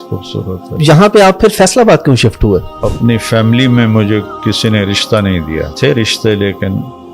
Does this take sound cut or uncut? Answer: cut